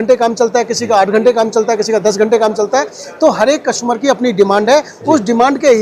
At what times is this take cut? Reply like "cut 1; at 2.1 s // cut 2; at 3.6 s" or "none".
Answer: none